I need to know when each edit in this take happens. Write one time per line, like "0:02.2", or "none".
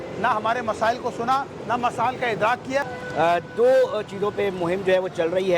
0:02.9